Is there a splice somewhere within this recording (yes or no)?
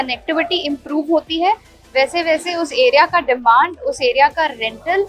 no